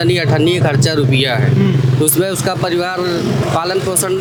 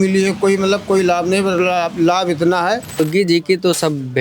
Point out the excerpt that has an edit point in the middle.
second; 1 cut; at 3.0 s

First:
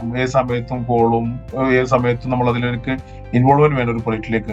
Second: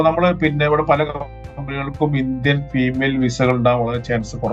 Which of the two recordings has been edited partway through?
first; 1 cut; at 1.4 s

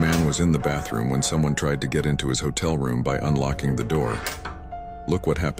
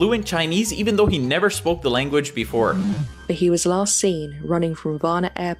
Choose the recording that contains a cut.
second; 1 cut; at 2.7 s

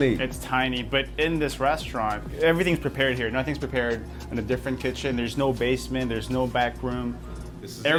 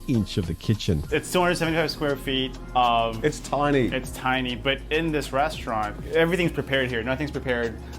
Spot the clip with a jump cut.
second; 1 cut; at 1.0 s

